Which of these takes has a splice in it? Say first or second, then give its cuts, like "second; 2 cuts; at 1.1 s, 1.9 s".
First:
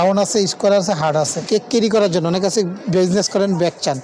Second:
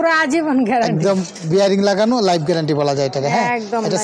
first; 1 cut; at 1.4 s